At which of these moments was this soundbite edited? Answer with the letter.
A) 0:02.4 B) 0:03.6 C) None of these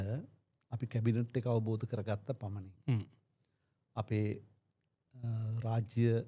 C